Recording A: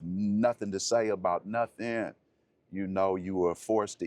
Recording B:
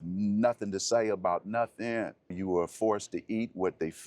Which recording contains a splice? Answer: B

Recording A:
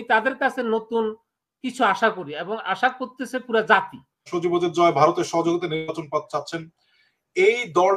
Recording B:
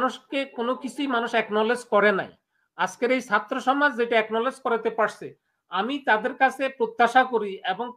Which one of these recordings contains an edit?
A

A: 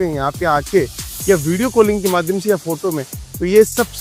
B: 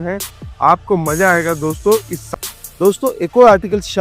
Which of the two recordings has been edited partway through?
B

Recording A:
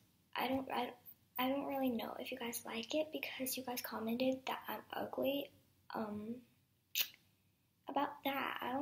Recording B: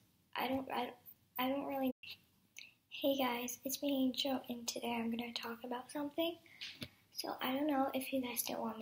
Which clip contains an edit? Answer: A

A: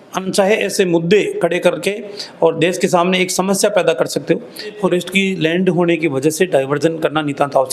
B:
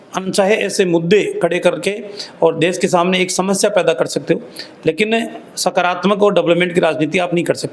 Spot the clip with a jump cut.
A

